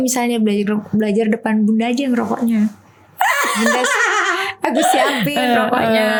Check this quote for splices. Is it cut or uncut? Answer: uncut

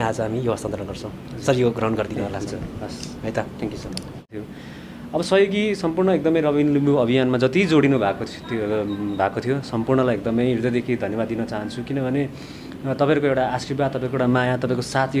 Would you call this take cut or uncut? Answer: cut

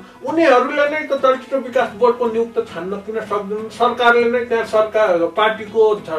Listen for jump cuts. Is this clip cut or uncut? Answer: uncut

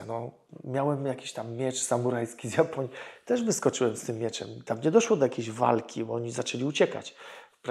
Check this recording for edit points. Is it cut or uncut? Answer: uncut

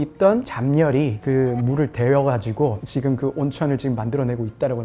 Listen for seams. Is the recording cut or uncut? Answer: uncut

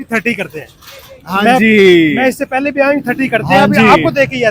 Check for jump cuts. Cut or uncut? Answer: uncut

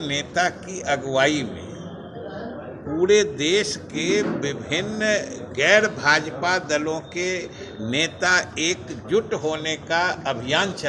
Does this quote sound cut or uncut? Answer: uncut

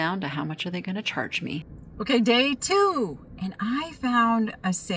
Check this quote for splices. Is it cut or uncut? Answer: cut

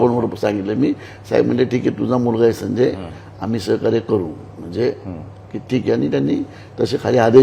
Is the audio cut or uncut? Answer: uncut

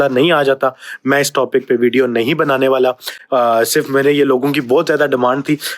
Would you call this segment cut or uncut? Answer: uncut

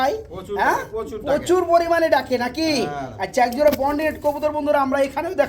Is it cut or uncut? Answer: uncut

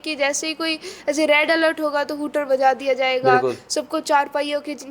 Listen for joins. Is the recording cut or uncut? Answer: uncut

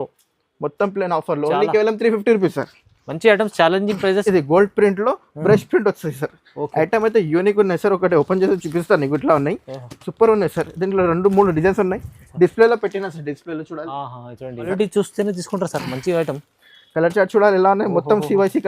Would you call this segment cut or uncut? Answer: cut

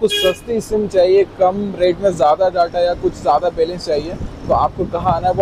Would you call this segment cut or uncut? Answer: uncut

